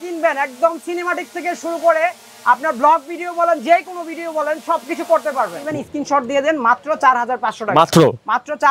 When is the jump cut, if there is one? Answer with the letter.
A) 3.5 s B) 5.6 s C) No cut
B